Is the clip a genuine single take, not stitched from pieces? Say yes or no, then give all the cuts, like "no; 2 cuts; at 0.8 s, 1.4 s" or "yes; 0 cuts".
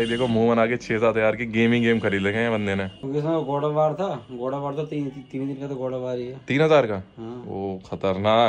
yes; 0 cuts